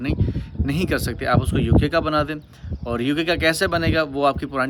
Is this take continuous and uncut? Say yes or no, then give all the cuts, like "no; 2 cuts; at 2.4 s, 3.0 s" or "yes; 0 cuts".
yes; 0 cuts